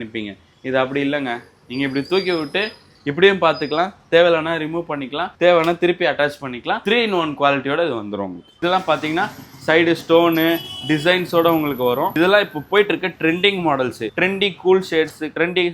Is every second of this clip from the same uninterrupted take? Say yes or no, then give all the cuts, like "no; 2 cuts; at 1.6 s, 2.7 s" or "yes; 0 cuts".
no; 2 cuts; at 8.5 s, 14.1 s